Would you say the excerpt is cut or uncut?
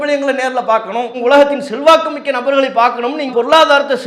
cut